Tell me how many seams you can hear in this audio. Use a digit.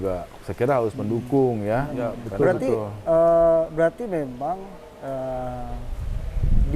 1